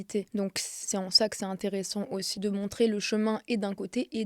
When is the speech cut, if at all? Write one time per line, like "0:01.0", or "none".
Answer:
0:00.7
0:02.4